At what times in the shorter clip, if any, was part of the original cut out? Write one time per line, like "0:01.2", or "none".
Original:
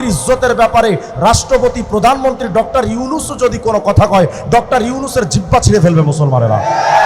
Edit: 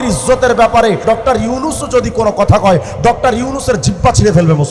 0:01.0